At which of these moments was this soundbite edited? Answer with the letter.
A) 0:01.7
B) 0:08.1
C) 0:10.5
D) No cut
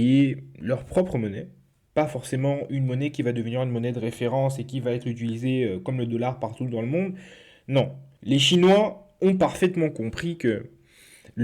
B